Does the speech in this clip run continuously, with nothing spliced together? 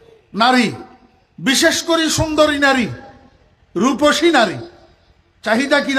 yes; 0 cuts

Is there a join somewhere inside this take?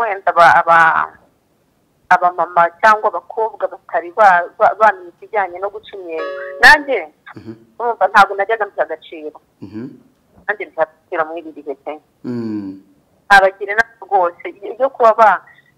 no; 0 cuts

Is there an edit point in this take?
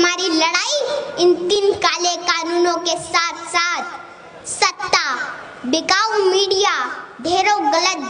yes; 1 cut; at 1.6 s

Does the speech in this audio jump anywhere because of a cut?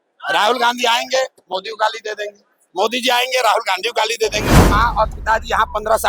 yes; 1 cut; at 4.6 s

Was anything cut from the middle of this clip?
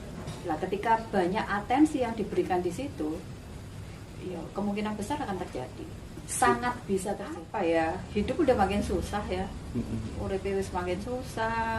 yes; 1 cut; at 7.5 s

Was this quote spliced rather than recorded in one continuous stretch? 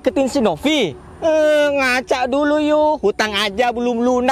no; 0 cuts

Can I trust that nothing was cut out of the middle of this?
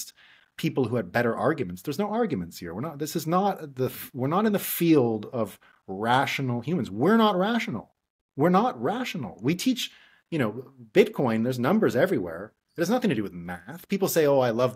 yes; 0 cuts

